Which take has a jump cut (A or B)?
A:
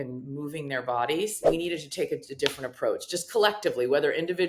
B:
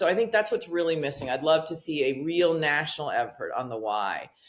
A